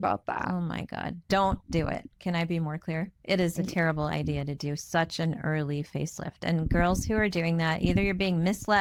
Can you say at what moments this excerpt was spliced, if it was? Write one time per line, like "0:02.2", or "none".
none